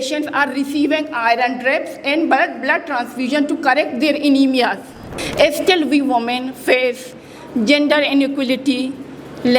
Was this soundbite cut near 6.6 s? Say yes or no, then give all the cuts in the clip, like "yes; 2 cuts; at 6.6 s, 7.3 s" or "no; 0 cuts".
no; 1 cut; at 5.2 s